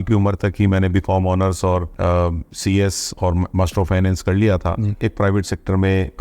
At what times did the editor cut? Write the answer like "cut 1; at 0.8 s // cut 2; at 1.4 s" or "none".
cut 1; at 1.9 s // cut 2; at 5.0 s